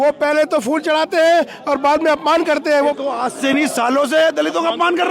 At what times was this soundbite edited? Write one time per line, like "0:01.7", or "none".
0:03.0

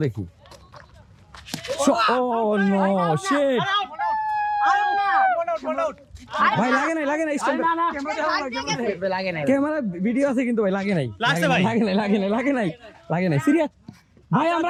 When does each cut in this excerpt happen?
none

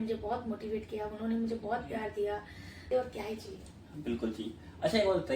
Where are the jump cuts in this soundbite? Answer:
0:02.9

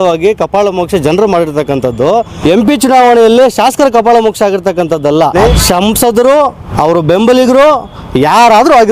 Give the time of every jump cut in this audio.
0:02.3
0:05.5
0:06.6

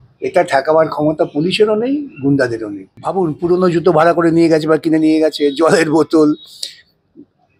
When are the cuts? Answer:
0:02.9

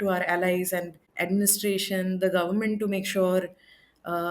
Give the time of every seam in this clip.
0:01.0

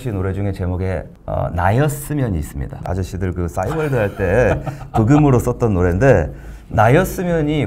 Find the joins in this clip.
0:01.2
0:02.8

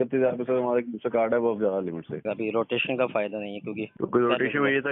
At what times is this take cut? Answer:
0:02.2
0:03.9

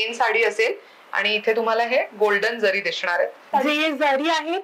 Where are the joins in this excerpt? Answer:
0:03.5

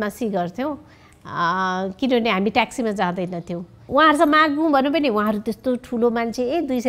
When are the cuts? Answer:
0:03.8

